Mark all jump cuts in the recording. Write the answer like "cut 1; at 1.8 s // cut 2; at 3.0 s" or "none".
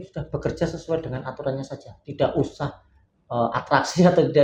none